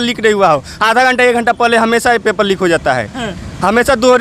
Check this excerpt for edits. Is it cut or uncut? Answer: uncut